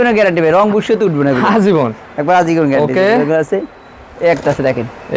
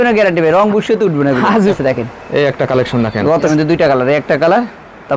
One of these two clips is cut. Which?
second; 2 cuts; at 1.7 s, 3.5 s

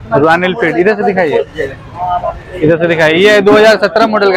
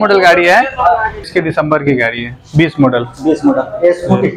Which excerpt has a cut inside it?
second; 1 cut; at 1.2 s

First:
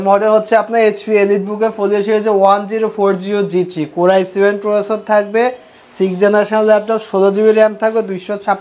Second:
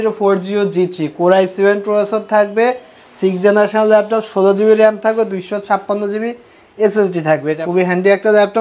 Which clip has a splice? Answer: second; 1 cut; at 7.6 s

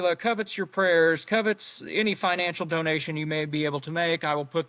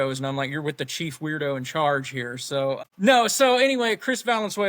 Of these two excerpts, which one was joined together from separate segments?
second; 1 cut; at 2.8 s

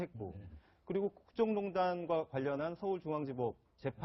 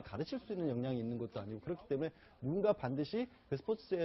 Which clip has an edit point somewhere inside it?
second; 1 cut; at 1.2 s

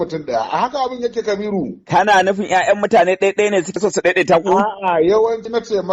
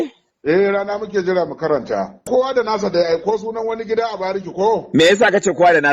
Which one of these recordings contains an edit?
second; 1 cut; at 2.2 s

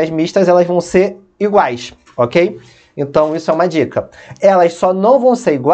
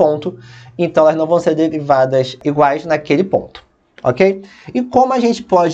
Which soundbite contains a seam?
second; 1 cut; at 2.4 s

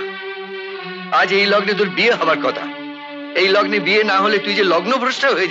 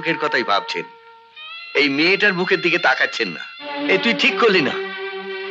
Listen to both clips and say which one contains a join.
second; 1 cut; at 3.8 s

